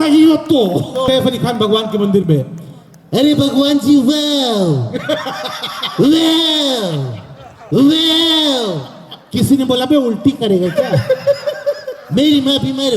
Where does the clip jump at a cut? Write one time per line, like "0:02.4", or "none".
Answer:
0:01.1